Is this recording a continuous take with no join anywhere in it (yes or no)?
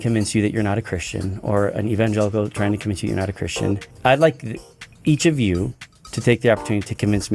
no